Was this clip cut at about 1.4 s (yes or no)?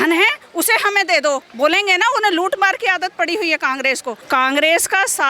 no